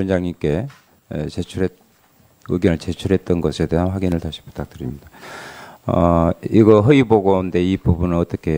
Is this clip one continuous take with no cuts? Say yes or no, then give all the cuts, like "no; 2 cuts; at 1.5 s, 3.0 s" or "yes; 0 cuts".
yes; 0 cuts